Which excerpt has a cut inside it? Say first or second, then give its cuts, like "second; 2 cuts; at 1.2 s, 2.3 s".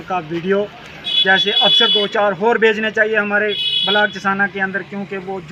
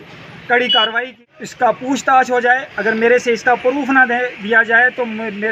second; 1 cut; at 1.1 s